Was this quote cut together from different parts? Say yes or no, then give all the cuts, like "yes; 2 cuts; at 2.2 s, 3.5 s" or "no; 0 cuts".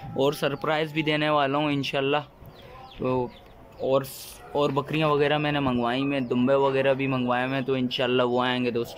no; 0 cuts